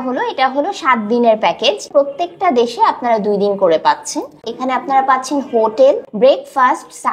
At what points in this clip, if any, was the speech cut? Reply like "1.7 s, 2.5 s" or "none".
1.8 s, 4.3 s, 6.1 s